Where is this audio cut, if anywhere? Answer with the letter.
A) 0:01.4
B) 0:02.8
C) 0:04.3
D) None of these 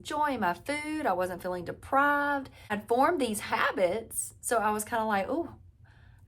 B